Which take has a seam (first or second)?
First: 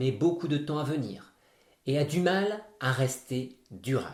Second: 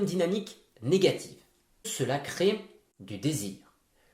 second